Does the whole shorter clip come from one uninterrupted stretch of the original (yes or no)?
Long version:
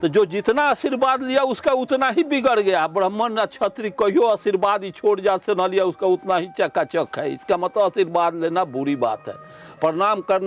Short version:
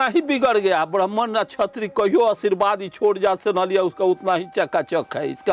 yes